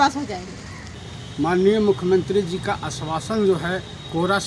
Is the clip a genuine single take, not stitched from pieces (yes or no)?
no